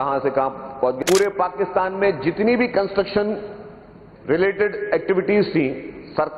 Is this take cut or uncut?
cut